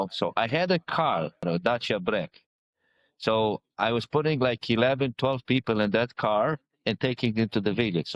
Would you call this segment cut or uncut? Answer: cut